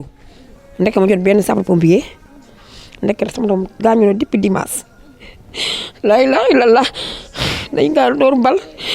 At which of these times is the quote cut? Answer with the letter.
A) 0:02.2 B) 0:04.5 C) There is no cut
A